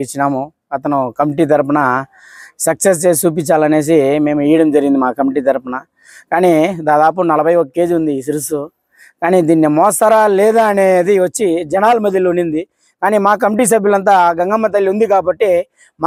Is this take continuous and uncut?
yes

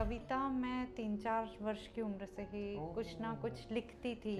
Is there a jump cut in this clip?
no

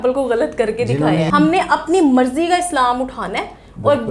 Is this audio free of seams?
no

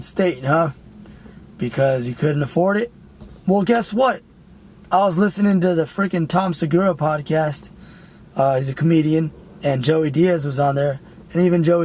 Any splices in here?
no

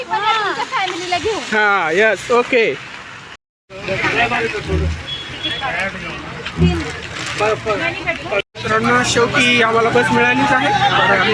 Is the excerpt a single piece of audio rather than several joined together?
yes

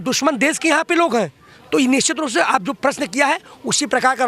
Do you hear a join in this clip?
no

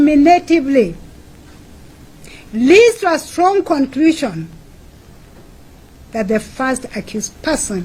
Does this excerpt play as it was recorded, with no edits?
yes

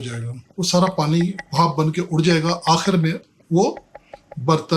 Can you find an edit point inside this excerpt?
no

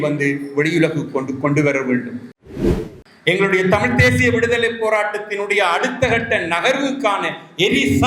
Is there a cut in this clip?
yes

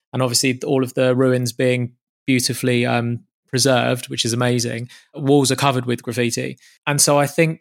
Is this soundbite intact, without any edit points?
no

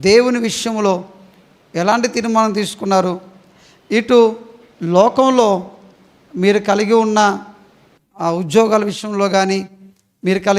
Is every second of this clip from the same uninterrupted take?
yes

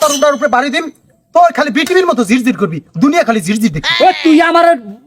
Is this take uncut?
yes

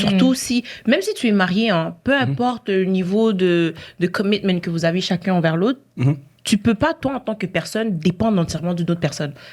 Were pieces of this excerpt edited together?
no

